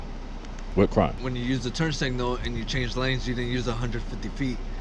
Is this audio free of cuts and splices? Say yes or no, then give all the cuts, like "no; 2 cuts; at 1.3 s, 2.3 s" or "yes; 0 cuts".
no; 1 cut; at 1.2 s